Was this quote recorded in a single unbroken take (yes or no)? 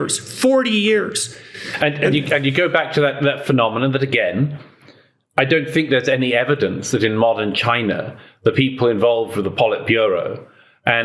yes